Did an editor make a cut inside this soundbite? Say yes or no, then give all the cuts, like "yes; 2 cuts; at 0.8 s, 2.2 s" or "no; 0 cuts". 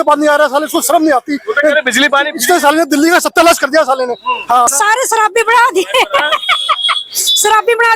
yes; 1 cut; at 4.7 s